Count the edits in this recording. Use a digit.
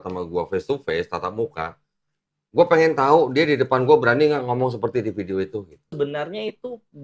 1